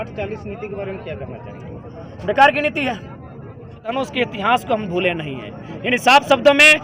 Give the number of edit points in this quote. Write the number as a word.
one